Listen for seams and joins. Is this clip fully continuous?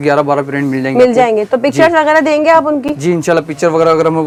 yes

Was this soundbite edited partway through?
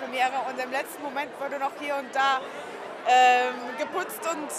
no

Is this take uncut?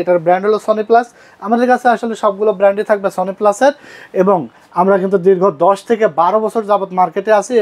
yes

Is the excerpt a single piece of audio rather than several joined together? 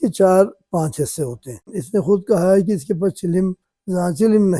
no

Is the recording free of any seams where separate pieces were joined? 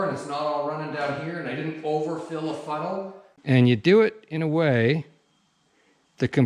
no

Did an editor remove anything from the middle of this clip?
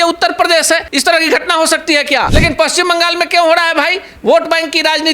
yes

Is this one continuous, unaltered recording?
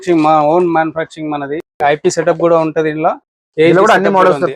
no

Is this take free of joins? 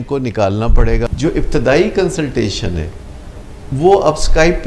no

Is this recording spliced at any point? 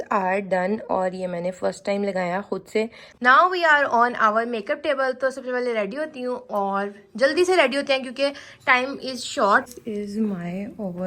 yes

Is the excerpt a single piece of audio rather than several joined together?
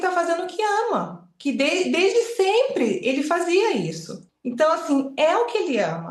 no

